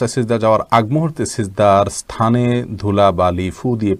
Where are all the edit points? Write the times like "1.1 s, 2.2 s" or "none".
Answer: none